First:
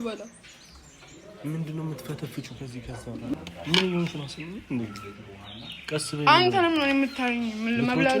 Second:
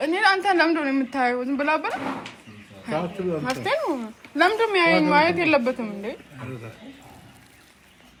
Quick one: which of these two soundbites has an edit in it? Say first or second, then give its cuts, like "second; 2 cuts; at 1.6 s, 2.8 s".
first; 1 cut; at 3.3 s